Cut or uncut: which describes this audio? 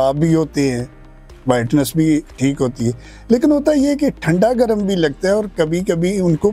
uncut